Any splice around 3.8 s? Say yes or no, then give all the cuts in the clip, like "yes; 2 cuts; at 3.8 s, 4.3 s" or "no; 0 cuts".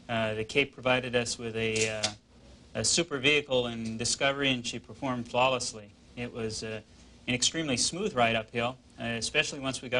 no; 1 cut; at 5.5 s